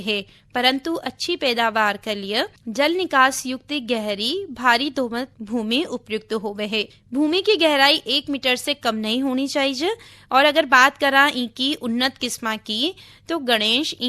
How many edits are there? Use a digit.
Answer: 3